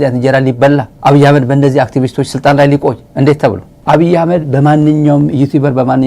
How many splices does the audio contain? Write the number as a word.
two